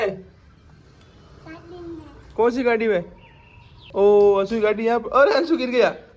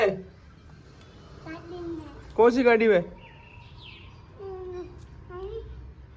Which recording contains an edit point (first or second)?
first